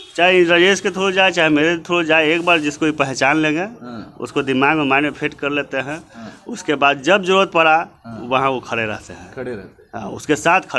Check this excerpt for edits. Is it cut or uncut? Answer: uncut